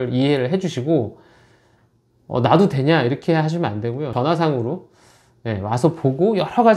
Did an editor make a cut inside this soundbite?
yes; 1 cut; at 4.1 s

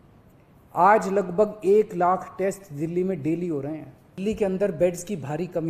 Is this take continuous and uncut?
no; 1 cut; at 4.0 s

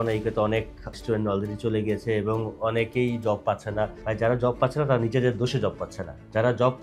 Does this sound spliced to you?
no; 0 cuts

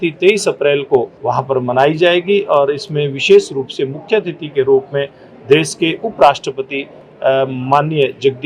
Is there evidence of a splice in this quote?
yes; 1 cut; at 1.2 s

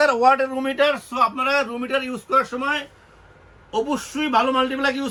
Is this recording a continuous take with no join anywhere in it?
yes; 0 cuts

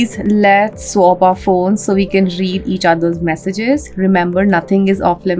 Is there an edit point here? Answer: no; 0 cuts

